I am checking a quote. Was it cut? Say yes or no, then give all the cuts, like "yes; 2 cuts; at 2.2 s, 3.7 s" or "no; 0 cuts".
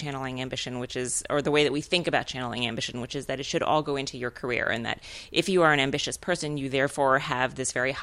no; 0 cuts